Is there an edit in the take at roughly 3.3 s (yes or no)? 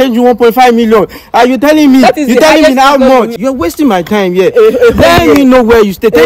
yes